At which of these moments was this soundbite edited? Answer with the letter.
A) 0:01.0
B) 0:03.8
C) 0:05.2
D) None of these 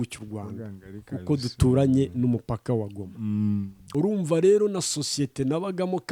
B